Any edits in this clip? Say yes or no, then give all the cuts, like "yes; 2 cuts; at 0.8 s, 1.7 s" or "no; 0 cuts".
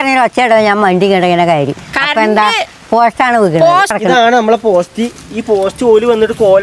yes; 1 cut; at 3.9 s